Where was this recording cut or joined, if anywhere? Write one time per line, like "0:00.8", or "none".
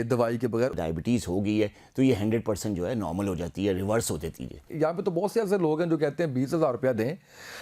0:00.7
0:04.7